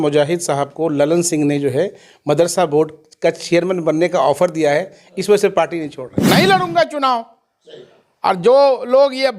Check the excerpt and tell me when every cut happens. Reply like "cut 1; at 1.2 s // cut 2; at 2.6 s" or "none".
cut 1; at 6.2 s